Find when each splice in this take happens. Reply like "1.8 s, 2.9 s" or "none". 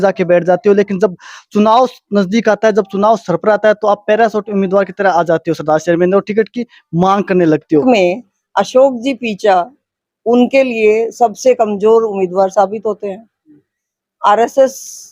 7.8 s

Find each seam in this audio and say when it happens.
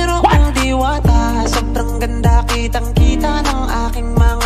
none

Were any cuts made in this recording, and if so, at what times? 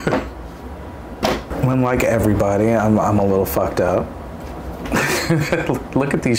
1.5 s

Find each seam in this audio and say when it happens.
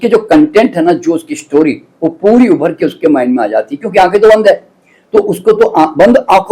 none

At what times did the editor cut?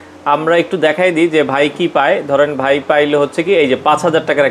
none

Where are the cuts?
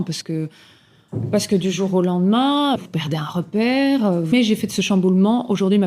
2.8 s, 4.3 s

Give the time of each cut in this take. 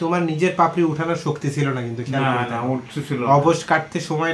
none

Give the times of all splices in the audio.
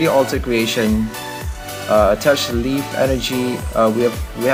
none

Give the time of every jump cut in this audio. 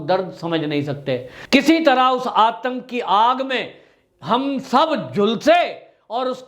1.3 s

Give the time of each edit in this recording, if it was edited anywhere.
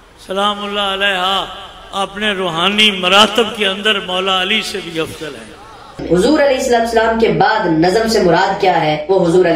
6.0 s

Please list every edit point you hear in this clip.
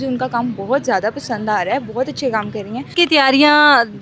2.9 s

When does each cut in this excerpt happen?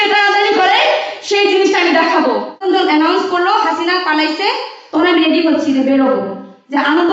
2.6 s

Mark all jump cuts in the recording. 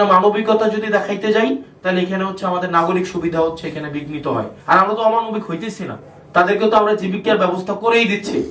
4.6 s

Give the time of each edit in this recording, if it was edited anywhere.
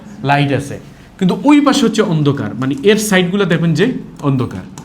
none

